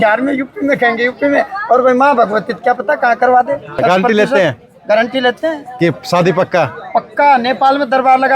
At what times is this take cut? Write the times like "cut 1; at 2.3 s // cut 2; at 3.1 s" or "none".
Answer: cut 1; at 3.8 s